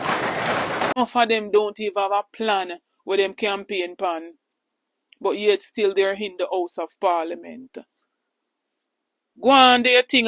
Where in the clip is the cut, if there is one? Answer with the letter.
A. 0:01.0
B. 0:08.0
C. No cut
A